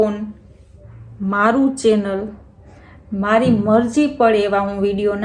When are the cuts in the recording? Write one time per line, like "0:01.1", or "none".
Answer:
none